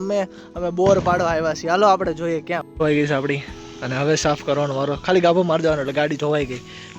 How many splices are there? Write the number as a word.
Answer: one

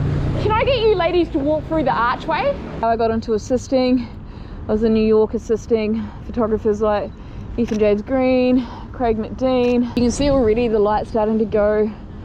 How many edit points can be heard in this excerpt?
two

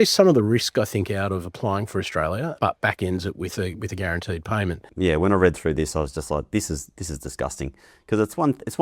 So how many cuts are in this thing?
one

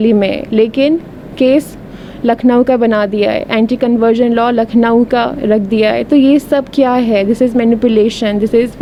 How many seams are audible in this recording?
zero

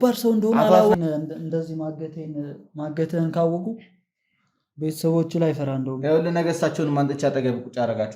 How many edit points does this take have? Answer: one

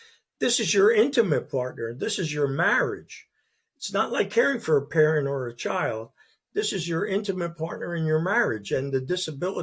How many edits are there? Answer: zero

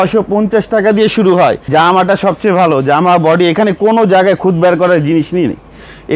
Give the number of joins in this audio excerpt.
one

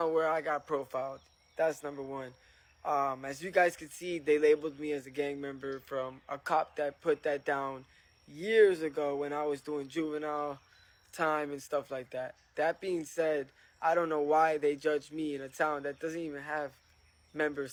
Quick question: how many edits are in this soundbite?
zero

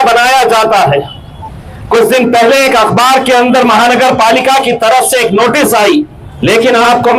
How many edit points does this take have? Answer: one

